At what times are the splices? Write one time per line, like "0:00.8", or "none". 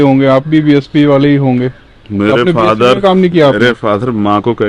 none